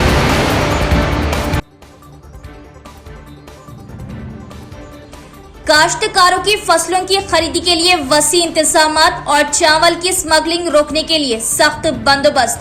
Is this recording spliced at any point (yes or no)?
yes